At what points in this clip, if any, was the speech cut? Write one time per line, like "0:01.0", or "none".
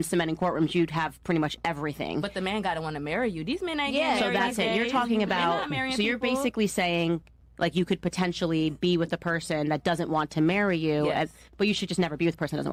none